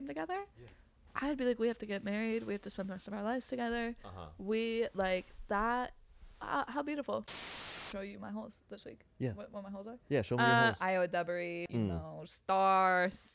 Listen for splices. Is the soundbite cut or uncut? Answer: cut